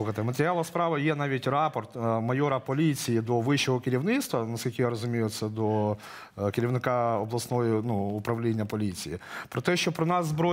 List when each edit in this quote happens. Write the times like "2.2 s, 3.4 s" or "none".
none

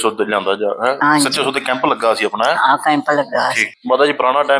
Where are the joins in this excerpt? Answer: 3.7 s

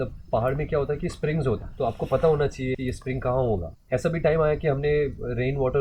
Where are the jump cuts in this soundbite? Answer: 1.7 s, 2.8 s, 3.7 s

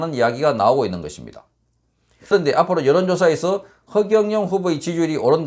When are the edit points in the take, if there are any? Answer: 2.3 s

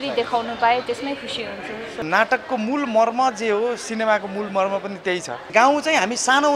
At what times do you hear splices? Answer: 2.0 s, 5.5 s

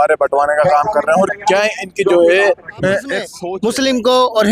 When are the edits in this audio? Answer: 3.3 s

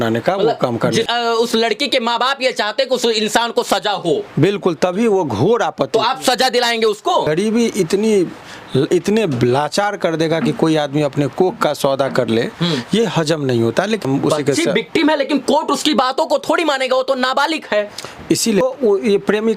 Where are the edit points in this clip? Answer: 1.1 s, 7.3 s, 14.0 s, 18.6 s

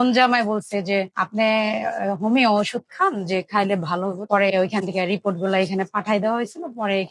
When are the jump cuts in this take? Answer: 4.2 s

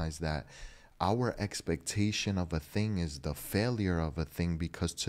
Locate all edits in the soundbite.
none

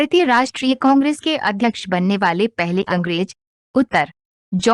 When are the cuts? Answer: 1.1 s

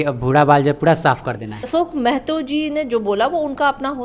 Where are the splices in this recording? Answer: 1.7 s

